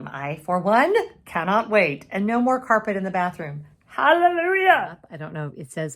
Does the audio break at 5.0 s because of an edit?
yes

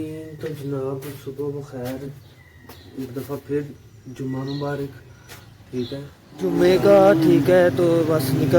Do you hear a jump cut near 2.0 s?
no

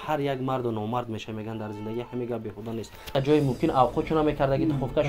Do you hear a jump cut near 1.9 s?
no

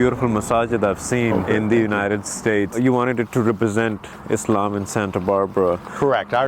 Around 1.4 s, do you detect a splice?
yes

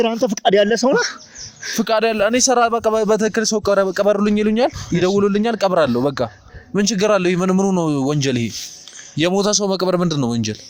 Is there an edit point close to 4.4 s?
no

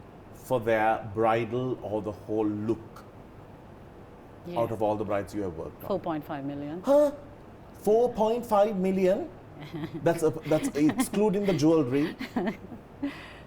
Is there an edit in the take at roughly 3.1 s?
no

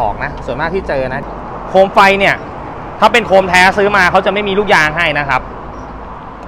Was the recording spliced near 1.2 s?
yes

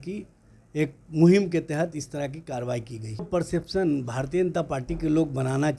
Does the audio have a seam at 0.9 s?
no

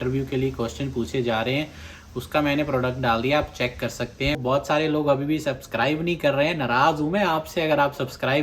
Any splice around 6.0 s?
no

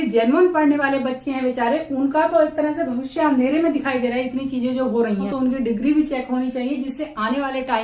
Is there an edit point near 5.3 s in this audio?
yes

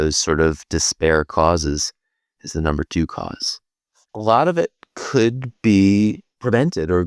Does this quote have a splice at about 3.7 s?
yes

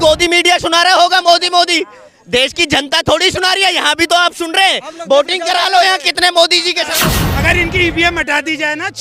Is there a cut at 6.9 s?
yes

